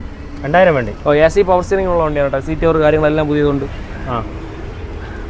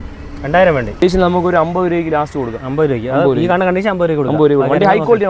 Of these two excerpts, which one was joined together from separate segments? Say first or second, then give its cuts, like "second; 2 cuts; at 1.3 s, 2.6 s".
second; 1 cut; at 1.0 s